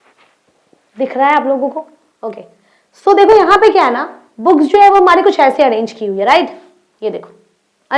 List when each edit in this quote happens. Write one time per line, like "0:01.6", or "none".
none

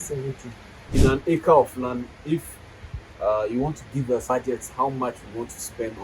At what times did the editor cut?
0:00.9

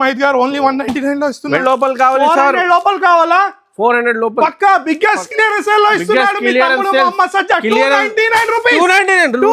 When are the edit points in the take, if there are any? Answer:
0:01.6

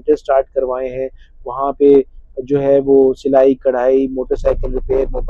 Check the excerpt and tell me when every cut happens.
none

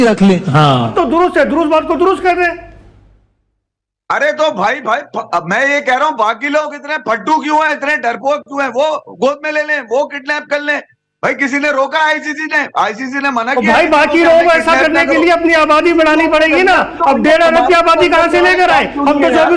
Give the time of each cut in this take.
0:00.9

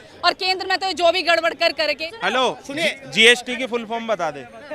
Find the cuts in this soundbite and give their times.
0:02.1

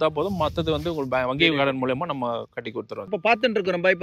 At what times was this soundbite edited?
none

